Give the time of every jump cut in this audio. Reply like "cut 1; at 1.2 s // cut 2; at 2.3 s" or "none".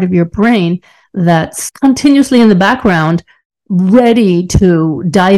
cut 1; at 1.6 s